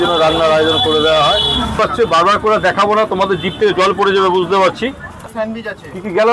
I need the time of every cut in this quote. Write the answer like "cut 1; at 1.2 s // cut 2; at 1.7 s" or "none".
cut 1; at 1.8 s // cut 2; at 5.3 s